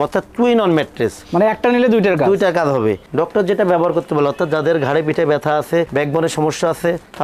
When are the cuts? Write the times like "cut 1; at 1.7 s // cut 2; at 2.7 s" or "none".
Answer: cut 1; at 3.1 s